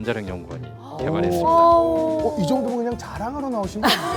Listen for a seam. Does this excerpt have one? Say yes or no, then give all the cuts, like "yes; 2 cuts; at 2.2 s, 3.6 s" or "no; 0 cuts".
yes; 1 cut; at 2.1 s